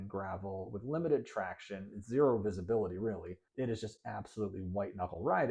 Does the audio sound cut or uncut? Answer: uncut